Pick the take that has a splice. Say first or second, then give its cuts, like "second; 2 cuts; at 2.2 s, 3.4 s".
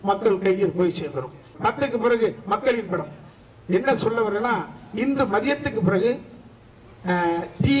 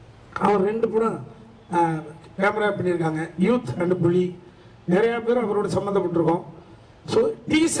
first; 1 cut; at 1.5 s